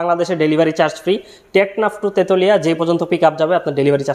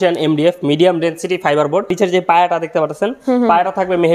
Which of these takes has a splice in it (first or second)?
second